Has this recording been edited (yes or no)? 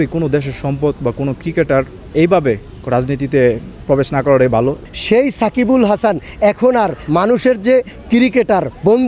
yes